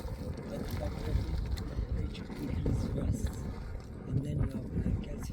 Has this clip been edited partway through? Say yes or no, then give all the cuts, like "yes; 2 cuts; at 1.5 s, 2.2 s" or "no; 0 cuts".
no; 0 cuts